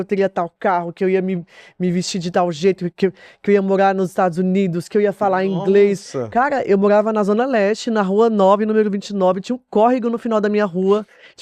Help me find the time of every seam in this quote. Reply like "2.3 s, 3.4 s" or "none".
none